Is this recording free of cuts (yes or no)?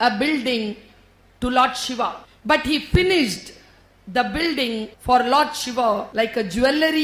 no